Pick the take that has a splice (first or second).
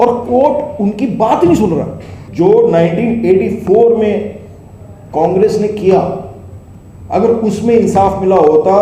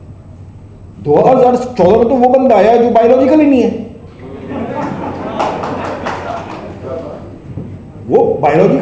first